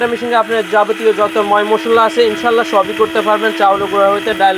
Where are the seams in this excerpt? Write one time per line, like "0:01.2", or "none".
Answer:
none